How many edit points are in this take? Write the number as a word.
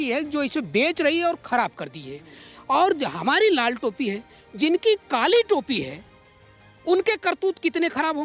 zero